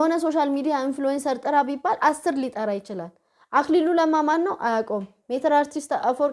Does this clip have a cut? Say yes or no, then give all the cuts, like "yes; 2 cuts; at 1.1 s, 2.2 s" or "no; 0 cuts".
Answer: no; 0 cuts